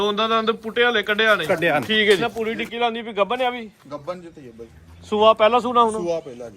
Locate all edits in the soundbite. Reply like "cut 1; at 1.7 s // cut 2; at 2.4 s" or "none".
cut 1; at 2.3 s